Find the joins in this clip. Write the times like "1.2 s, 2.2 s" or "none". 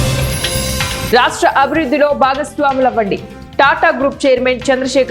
1.1 s